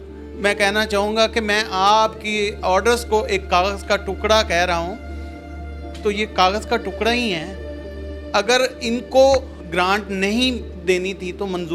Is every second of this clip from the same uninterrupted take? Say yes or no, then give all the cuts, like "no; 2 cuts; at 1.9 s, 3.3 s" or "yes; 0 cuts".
yes; 0 cuts